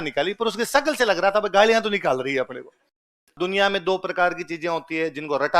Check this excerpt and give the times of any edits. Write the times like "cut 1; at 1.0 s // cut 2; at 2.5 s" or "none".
cut 1; at 3.4 s